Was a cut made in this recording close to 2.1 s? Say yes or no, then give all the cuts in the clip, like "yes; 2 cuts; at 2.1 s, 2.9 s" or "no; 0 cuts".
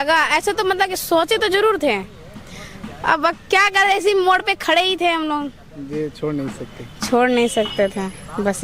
no; 0 cuts